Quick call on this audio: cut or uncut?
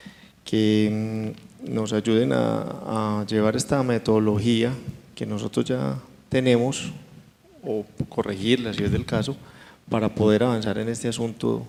uncut